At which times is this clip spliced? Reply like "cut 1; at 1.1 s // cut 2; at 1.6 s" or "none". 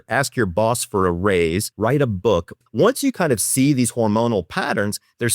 cut 1; at 1.7 s // cut 2; at 2.6 s